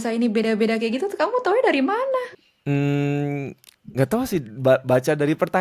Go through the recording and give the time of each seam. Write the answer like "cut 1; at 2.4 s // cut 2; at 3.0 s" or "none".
none

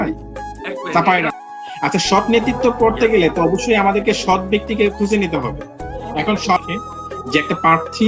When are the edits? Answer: cut 1; at 1.3 s // cut 2; at 6.6 s

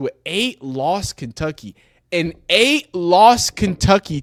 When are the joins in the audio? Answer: none

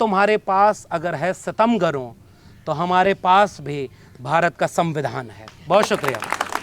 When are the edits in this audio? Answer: none

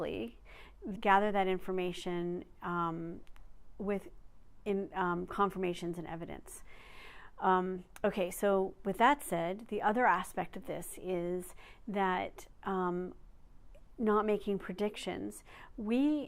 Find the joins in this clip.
none

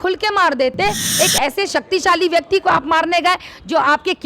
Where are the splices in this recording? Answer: cut 1; at 1.0 s

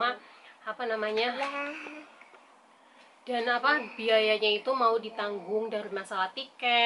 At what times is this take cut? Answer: none

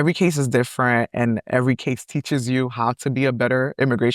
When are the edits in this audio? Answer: none

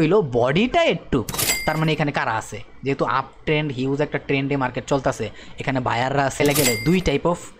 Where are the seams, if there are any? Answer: cut 1; at 1.4 s // cut 2; at 6.4 s

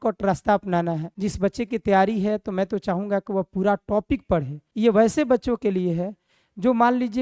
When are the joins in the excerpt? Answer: cut 1; at 1.1 s // cut 2; at 4.6 s

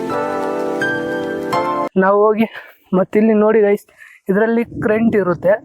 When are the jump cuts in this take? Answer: cut 1; at 1.9 s

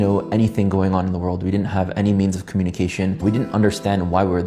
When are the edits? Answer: cut 1; at 3.2 s

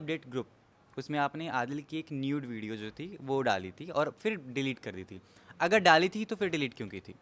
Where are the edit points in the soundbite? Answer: none

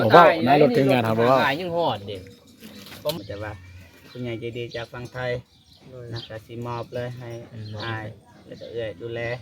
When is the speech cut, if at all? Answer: cut 1; at 3.2 s

